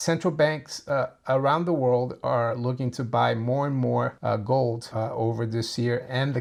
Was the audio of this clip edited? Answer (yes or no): no